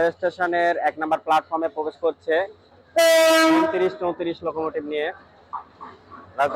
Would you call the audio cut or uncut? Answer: uncut